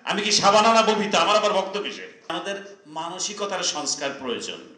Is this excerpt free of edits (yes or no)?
no